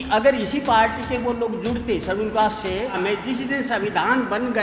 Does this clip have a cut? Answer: yes; 1 cut; at 3.0 s

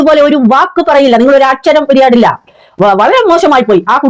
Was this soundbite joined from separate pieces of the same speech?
no; 0 cuts

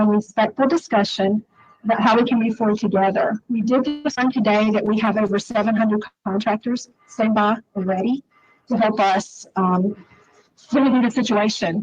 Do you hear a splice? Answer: no; 0 cuts

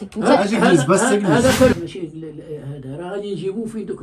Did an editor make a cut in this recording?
yes; 1 cut; at 1.7 s

